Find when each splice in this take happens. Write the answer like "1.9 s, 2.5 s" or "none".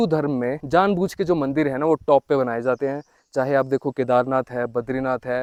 none